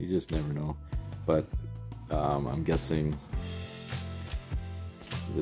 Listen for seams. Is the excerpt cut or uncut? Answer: uncut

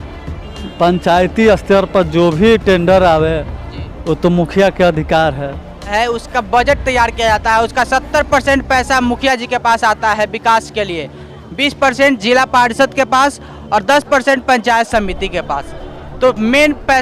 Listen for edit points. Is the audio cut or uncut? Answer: cut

